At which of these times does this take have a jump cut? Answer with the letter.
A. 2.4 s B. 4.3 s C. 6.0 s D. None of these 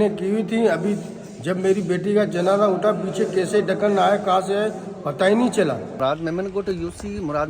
C